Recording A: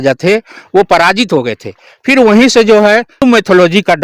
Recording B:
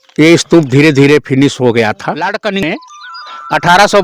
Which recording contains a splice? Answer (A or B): B